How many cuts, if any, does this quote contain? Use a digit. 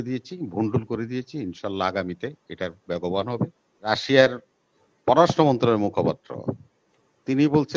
1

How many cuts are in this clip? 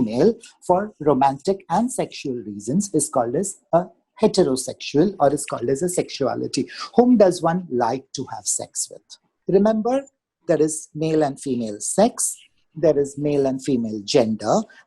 1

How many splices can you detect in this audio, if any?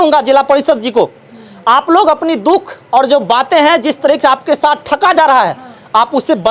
0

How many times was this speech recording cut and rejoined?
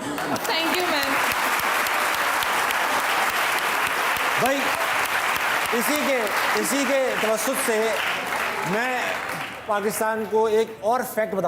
0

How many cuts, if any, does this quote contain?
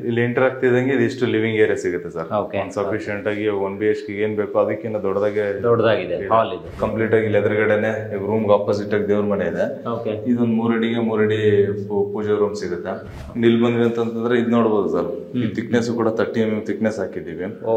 2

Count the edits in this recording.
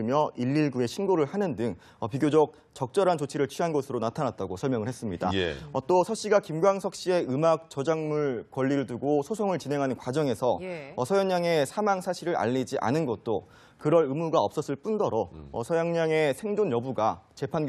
0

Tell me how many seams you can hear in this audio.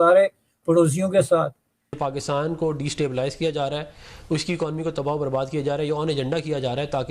1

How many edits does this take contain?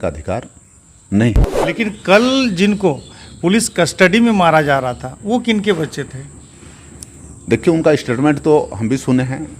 1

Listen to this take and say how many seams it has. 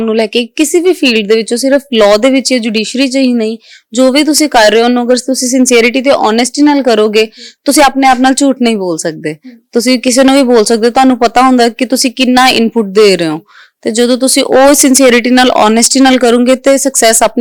0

